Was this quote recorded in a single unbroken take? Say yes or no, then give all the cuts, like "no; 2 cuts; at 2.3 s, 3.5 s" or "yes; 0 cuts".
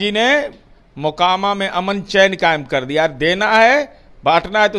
yes; 0 cuts